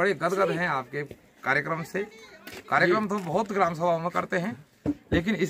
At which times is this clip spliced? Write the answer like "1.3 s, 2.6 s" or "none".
none